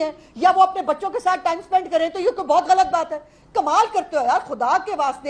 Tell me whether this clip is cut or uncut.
uncut